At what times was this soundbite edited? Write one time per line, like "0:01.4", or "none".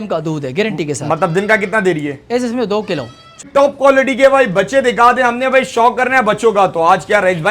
0:03.4